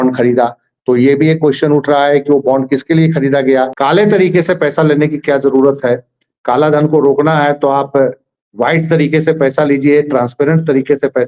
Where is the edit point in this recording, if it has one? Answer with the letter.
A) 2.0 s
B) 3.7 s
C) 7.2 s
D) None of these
B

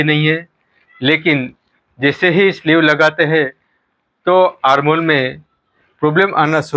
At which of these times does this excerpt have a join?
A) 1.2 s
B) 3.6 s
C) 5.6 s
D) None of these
D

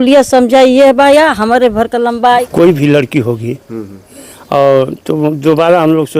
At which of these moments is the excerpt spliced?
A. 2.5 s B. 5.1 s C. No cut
A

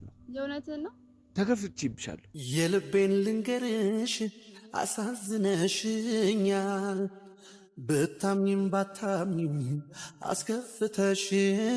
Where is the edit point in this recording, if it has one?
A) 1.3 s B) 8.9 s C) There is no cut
C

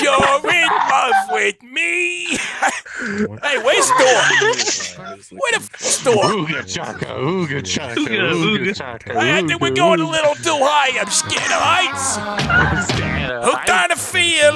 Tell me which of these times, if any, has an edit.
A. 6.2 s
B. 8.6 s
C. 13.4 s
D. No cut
C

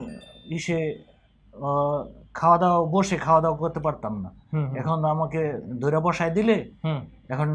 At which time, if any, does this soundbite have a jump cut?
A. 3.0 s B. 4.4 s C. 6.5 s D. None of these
D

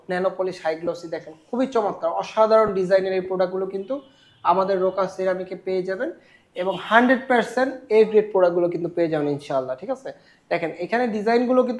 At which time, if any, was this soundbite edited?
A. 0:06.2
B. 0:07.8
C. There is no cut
C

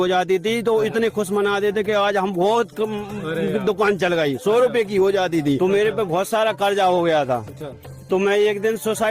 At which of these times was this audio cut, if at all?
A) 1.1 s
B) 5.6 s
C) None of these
B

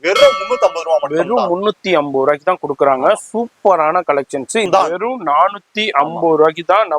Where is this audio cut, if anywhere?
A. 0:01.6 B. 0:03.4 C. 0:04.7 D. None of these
C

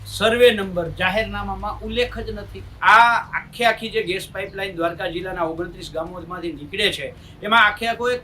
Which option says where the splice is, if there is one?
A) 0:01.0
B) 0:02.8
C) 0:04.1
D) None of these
B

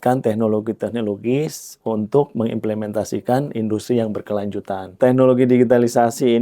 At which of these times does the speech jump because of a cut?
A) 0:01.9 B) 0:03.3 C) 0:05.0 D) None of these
C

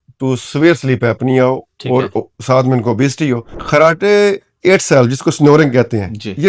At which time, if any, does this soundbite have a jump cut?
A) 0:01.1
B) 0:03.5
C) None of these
B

